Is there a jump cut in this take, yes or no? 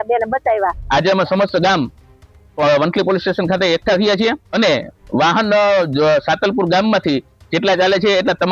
yes